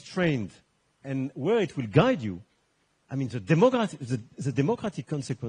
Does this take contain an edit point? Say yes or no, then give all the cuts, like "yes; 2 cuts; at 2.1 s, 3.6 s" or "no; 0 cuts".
no; 0 cuts